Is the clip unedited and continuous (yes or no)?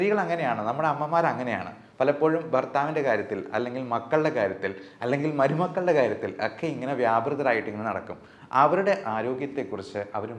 yes